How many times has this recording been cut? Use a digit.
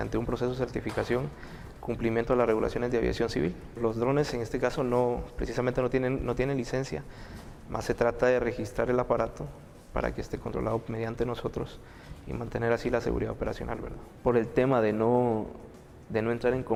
0